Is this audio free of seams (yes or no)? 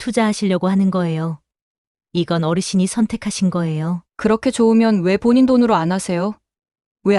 no